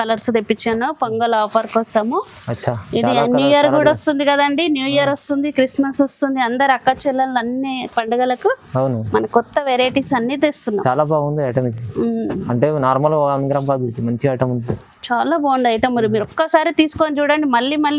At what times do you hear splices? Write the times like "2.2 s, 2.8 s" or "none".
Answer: none